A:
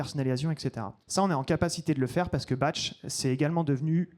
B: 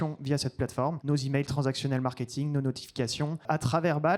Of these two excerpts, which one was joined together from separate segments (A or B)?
B